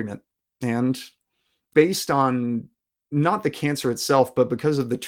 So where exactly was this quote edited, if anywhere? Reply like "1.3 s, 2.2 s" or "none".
1.6 s

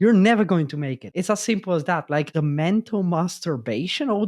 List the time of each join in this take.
1.0 s, 2.3 s

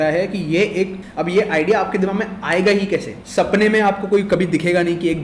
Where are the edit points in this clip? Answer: 1.0 s, 3.2 s

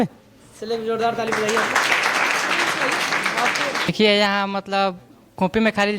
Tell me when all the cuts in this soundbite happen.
3.9 s

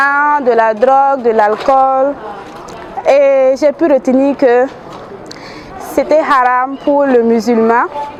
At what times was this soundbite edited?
none

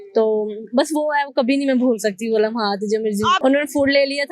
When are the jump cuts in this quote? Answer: 3.4 s

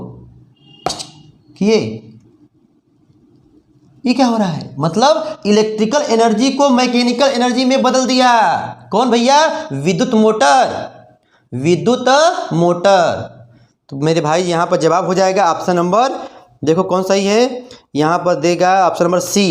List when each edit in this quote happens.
none

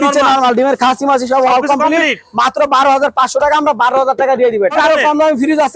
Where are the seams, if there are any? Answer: 4.8 s

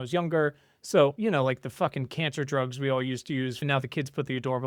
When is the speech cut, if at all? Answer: 1.2 s, 3.6 s

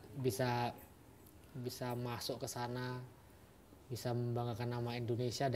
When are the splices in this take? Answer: none

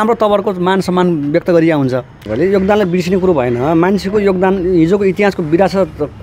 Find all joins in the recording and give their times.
2.2 s

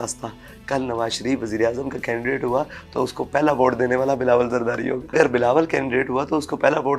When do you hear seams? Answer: 5.1 s

